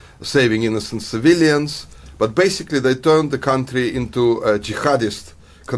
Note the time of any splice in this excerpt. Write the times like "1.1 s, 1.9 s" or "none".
3.2 s